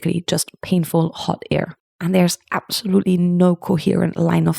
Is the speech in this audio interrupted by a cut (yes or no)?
yes